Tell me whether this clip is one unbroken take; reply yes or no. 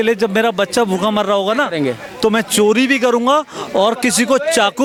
yes